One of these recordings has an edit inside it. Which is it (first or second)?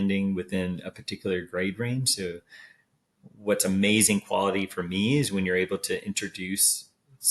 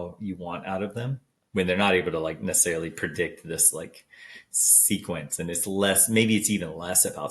second